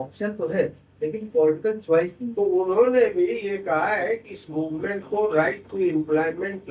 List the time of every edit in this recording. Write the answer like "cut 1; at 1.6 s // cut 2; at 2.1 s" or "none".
cut 1; at 2.2 s